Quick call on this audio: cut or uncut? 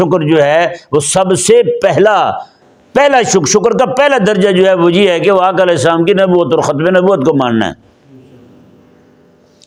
uncut